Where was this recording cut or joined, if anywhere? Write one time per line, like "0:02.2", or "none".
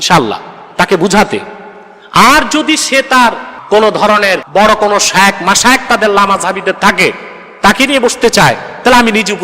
none